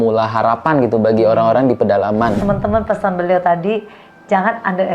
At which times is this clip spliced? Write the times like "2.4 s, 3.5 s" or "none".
2.4 s, 3.9 s